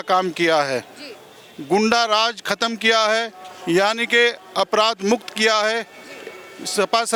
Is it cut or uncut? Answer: uncut